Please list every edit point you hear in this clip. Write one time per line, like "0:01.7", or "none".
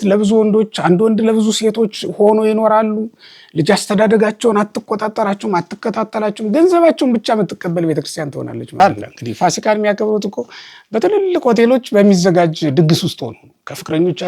0:08.8

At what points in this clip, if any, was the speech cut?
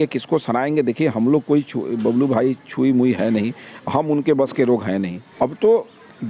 0:05.2

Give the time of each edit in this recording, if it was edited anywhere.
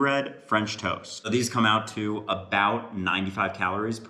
0:01.1

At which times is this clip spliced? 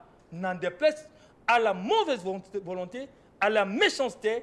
none

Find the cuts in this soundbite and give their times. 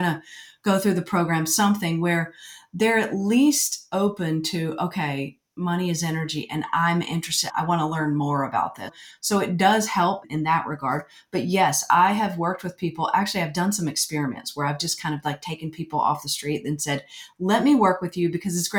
none

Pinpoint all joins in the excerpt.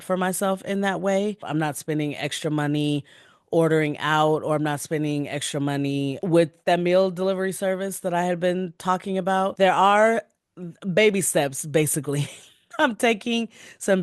0:01.4
0:06.4
0:09.5

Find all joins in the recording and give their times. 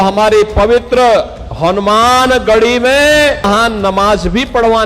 0:03.5

